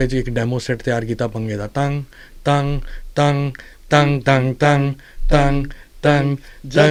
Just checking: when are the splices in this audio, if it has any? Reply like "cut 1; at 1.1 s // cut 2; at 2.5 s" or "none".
none